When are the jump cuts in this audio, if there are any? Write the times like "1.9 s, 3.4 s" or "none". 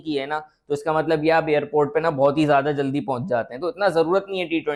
none